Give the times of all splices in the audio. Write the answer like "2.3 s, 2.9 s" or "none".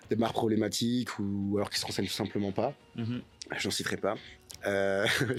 none

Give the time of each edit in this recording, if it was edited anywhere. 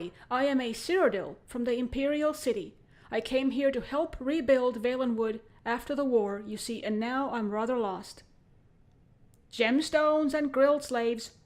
5.5 s

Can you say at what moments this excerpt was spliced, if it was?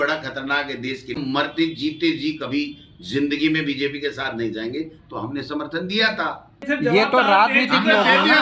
1.2 s, 6.6 s

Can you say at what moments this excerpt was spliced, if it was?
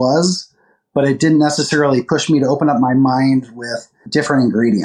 3.9 s

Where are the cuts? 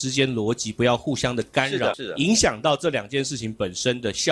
2.0 s

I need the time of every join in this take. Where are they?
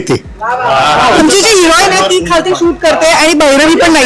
1.2 s

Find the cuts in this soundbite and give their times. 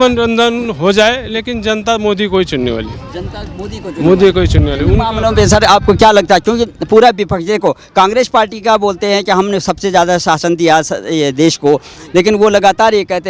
none

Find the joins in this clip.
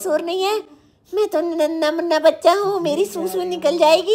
none

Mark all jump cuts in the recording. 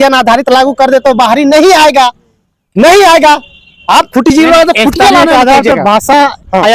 none

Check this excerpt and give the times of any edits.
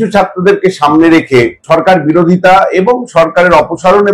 1.6 s

